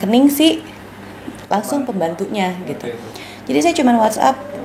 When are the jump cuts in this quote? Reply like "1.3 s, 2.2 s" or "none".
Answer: none